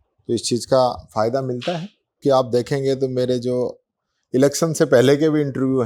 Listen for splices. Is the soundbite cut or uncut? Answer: cut